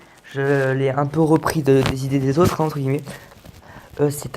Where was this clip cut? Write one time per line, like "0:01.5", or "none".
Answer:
0:00.9